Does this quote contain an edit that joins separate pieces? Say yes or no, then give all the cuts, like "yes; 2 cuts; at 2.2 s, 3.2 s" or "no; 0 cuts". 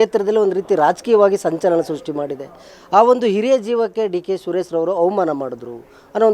no; 0 cuts